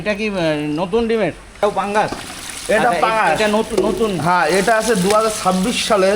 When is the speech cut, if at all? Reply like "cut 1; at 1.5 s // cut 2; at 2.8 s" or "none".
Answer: cut 1; at 1.4 s